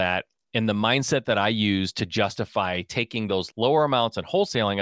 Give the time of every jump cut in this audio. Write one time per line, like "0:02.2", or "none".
0:03.5